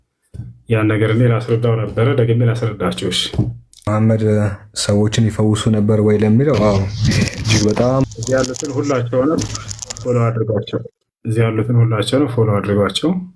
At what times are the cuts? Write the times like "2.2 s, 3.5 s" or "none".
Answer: 3.9 s, 8.0 s